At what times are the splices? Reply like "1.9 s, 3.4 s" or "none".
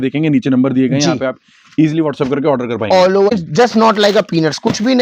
3.3 s